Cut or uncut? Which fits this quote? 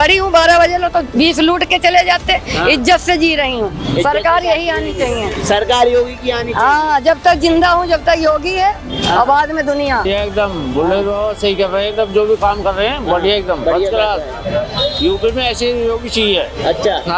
cut